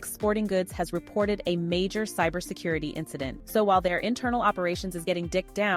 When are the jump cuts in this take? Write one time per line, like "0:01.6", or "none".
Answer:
0:03.4

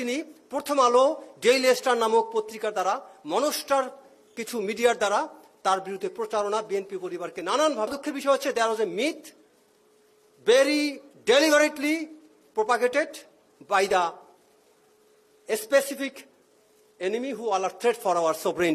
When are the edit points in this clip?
0:07.9

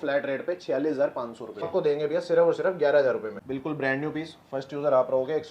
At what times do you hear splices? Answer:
0:01.7
0:03.3

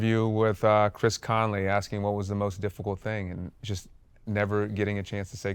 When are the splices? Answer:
0:03.5

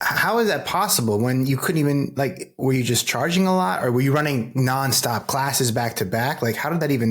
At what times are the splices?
none

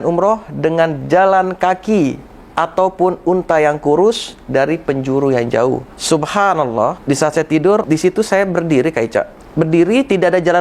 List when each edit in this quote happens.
0:05.9
0:07.0
0:07.8
0:09.4

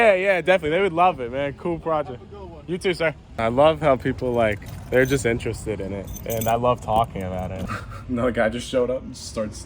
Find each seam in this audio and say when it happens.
0:03.3
0:07.6

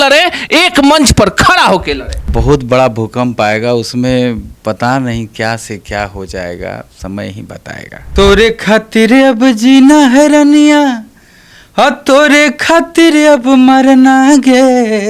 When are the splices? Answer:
0:02.3
0:08.1

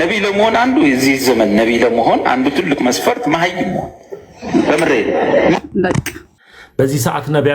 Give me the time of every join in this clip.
0:06.2

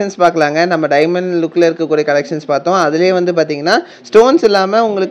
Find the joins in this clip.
none

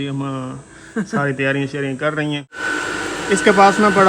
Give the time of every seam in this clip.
0:02.5

